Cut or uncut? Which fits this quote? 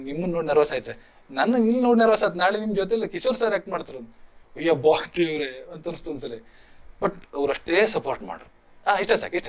uncut